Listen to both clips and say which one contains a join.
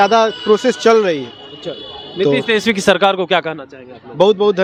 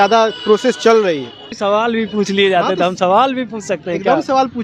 second; 1 cut; at 1.6 s

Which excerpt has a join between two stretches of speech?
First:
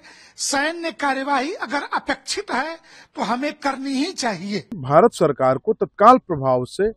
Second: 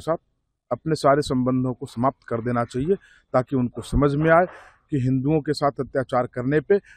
first; 1 cut; at 4.8 s

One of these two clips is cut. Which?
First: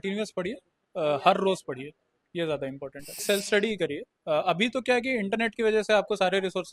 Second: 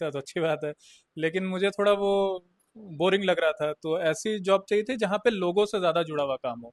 first; 1 cut; at 3.2 s

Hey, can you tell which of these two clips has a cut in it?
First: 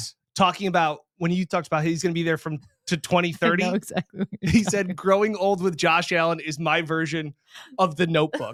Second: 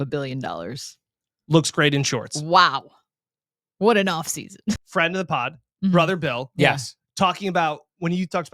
second; 1 cut; at 4.8 s

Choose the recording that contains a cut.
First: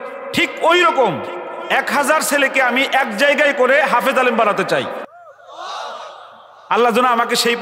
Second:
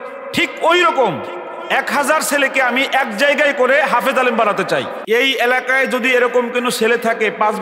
second; 1 cut; at 5.0 s

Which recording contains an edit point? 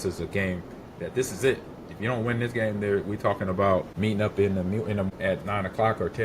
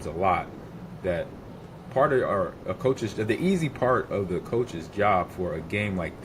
first; 2 cuts; at 3.9 s, 5.1 s

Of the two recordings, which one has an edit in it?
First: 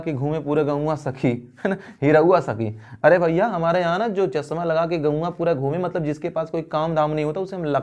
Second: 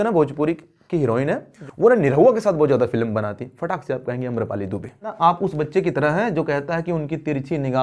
second; 2 cuts; at 1.5 s, 5.0 s

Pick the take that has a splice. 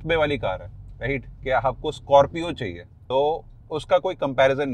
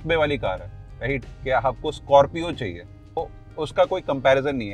second; 1 cut; at 3.2 s

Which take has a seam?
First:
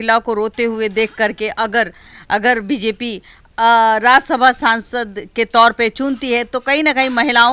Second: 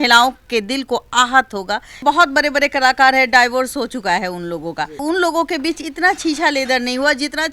second; 2 cuts; at 1.9 s, 5.0 s

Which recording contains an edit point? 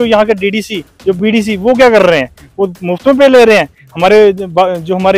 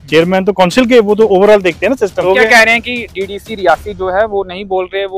second; 1 cut; at 2.2 s

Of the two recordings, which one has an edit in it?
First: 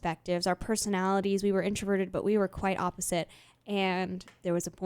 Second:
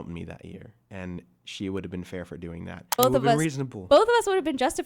second; 1 cut; at 3.0 s

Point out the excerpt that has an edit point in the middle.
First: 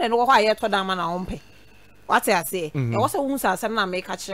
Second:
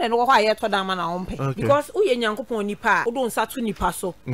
second; 2 cuts; at 1.4 s, 3.0 s

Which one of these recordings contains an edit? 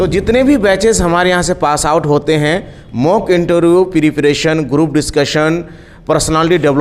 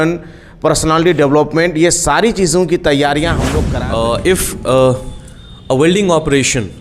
second; 1 cut; at 3.6 s

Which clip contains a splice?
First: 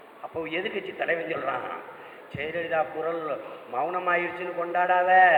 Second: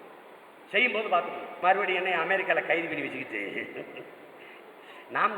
second; 1 cut; at 1.5 s

